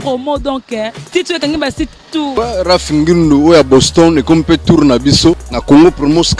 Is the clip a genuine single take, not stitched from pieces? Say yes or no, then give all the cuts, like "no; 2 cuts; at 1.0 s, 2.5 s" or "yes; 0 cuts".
no; 2 cuts; at 2.3 s, 5.5 s